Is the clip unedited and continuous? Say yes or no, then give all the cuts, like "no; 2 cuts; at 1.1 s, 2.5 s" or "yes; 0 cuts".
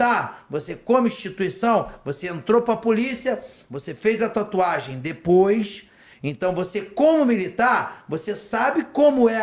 yes; 0 cuts